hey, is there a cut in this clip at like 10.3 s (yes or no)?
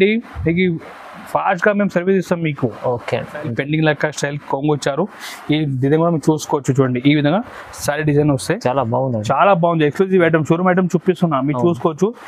no